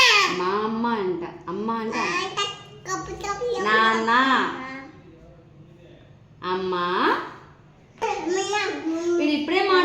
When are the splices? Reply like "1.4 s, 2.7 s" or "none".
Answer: 8.0 s